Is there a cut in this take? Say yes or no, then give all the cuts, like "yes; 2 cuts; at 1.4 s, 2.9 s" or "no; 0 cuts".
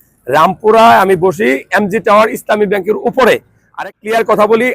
yes; 1 cut; at 3.9 s